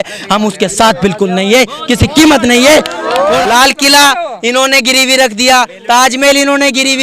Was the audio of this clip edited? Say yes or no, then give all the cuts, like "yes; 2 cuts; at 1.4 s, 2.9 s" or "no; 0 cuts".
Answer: yes; 1 cut; at 3.4 s